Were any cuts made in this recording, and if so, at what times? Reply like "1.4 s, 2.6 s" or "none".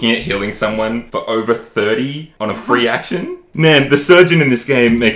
1.1 s, 2.3 s, 3.4 s